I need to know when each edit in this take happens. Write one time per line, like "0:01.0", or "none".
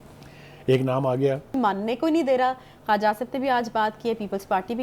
0:01.6

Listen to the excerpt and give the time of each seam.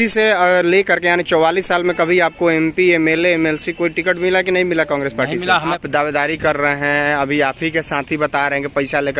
0:05.8

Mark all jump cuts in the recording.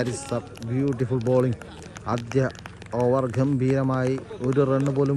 none

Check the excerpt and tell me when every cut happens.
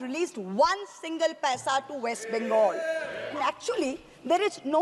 0:03.2

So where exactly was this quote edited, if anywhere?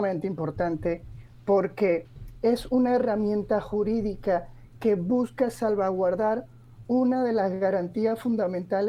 none

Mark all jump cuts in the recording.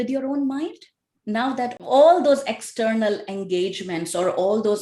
none

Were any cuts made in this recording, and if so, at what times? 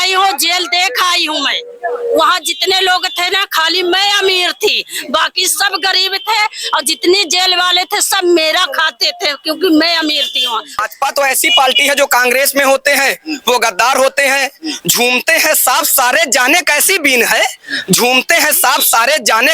0:10.8

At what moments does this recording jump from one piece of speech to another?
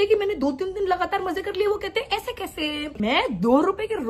0:02.9

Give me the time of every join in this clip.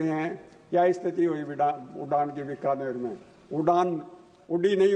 none

